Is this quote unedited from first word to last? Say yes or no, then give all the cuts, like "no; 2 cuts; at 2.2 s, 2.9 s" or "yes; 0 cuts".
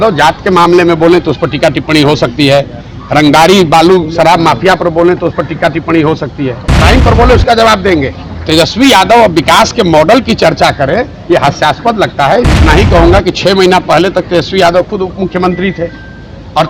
no; 2 cuts; at 6.7 s, 12.5 s